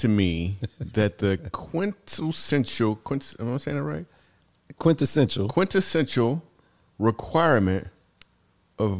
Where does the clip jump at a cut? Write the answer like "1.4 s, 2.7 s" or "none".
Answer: none